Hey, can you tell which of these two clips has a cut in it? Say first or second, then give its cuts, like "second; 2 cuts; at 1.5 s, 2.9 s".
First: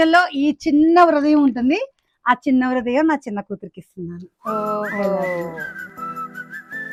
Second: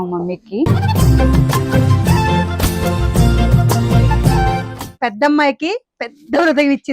second; 1 cut; at 4.8 s